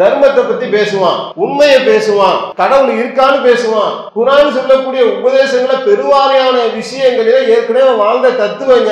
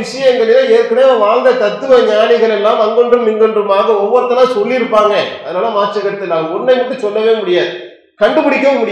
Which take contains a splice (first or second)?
first